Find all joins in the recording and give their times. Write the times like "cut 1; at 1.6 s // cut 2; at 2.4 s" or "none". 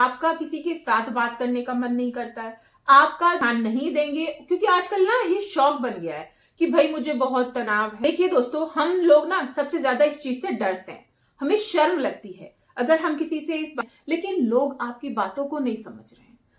cut 1; at 3.4 s // cut 2; at 7.9 s // cut 3; at 13.8 s